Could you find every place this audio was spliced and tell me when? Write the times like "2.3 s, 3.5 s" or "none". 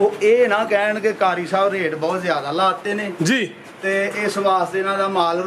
none